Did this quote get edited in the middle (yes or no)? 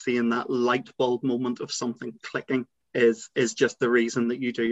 yes